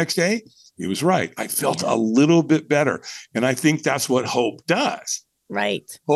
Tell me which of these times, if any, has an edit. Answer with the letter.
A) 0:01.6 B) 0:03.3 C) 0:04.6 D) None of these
D